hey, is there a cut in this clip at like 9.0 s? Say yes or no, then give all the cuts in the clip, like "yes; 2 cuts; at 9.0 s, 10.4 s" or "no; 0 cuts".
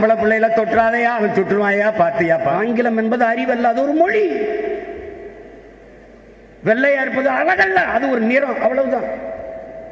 no; 1 cut; at 2.5 s